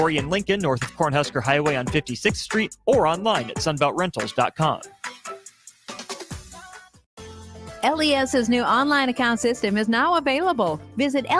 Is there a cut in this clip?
yes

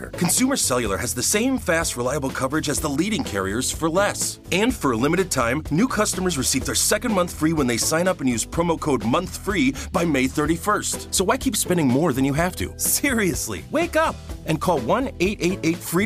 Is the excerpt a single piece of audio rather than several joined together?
yes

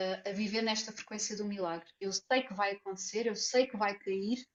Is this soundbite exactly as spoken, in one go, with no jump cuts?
yes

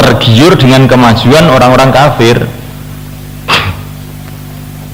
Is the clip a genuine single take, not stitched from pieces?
yes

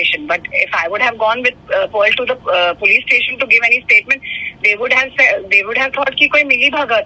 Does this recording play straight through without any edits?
yes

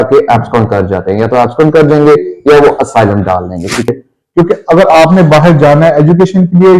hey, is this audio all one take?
no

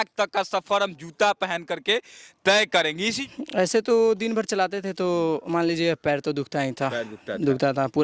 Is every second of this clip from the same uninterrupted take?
no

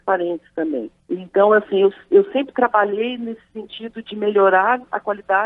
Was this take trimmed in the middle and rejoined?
yes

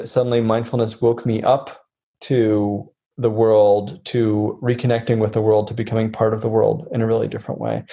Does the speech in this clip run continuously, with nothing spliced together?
yes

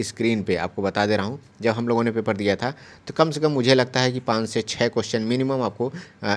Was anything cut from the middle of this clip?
no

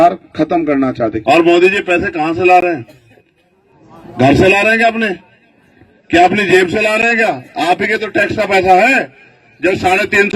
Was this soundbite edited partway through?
yes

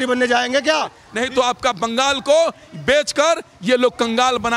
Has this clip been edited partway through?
yes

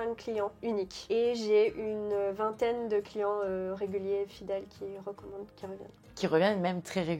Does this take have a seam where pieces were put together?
no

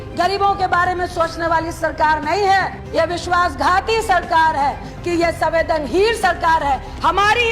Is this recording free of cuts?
no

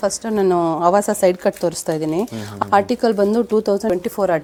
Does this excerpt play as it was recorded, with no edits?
yes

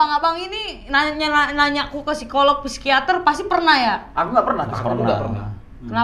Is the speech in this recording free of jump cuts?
yes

